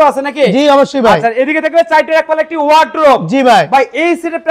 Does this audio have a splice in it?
no; 0 cuts

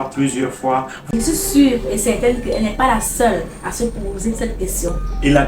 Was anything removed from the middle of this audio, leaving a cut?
yes; 1 cut; at 1.0 s

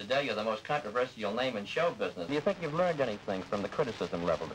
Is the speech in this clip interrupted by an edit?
yes; 1 cut; at 2.3 s

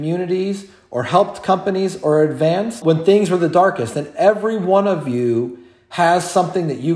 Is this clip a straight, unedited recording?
no; 1 cut; at 2.8 s

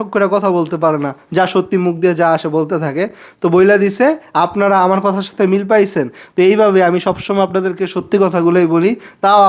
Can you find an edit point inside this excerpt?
no; 0 cuts

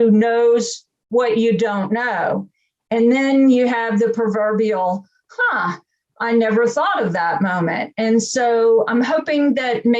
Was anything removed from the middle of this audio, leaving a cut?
yes; 1 cut; at 8.9 s

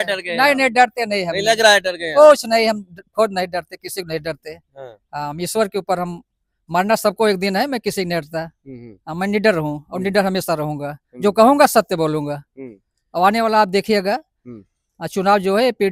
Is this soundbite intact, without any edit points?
yes; 0 cuts

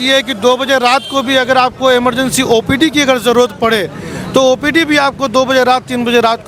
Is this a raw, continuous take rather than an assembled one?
yes; 0 cuts

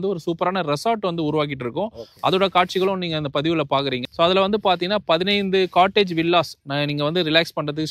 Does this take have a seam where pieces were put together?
no; 0 cuts

